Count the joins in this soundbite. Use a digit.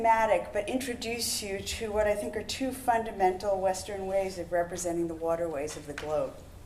1